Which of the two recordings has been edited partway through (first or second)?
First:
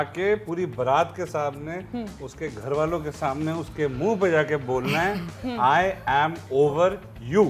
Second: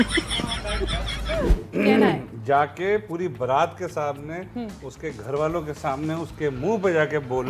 second